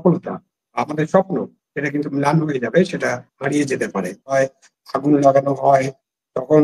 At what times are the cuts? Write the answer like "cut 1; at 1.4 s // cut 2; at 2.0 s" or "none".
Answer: cut 1; at 4.3 s